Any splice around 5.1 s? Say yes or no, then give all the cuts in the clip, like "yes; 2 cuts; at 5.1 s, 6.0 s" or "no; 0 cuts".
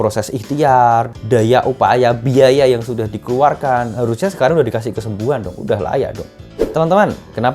no; 2 cuts; at 1.2 s, 6.5 s